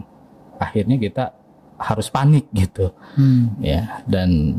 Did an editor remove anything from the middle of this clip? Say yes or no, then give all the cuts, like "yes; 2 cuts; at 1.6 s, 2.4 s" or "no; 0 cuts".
no; 0 cuts